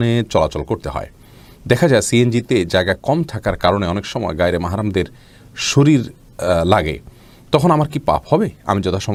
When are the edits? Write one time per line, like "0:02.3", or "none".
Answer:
none